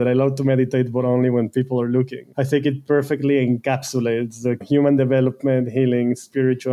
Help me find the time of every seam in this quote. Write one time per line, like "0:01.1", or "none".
0:02.2
0:04.6